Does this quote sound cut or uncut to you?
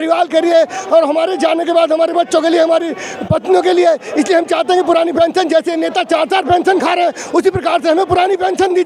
uncut